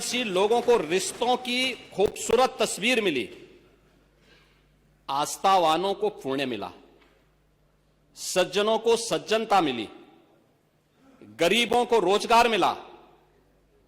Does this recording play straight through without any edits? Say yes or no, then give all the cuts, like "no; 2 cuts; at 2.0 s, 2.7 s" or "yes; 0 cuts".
yes; 0 cuts